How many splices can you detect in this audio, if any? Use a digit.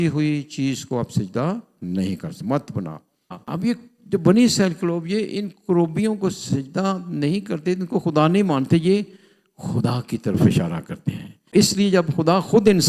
2